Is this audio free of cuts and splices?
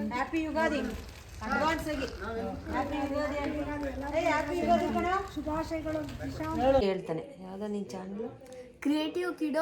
no; 1 cut; at 6.8 s

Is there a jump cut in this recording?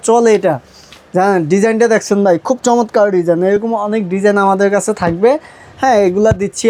no; 0 cuts

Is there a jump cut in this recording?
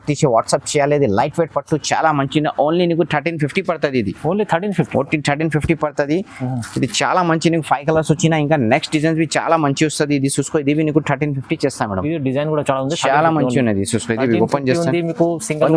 no; 0 cuts

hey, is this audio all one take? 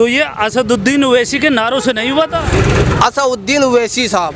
no; 1 cut; at 2.4 s

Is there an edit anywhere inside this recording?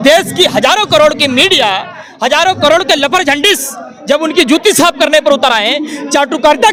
no; 0 cuts

